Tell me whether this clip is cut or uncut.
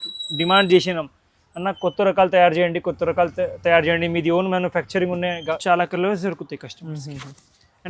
cut